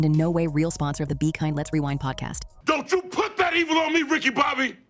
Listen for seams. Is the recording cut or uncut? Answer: cut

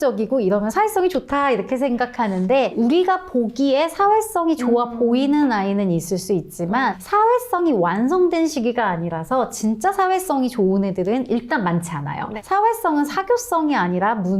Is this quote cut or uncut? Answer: cut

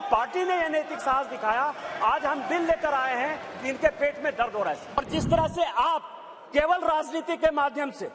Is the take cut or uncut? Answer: cut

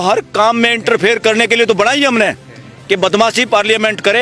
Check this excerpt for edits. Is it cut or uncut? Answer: uncut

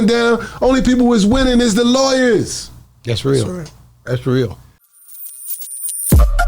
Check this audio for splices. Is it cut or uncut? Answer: cut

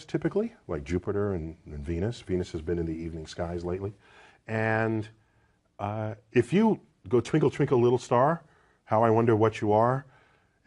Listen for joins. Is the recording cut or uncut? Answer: cut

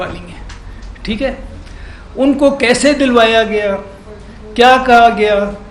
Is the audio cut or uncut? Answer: uncut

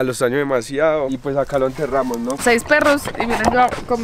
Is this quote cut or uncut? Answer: cut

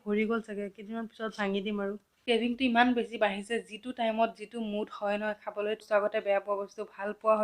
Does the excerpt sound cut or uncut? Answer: cut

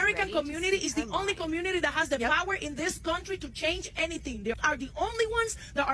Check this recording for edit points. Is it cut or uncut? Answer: uncut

